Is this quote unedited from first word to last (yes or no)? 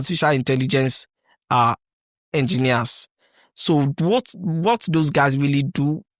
yes